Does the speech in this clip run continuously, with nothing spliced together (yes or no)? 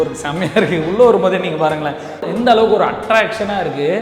no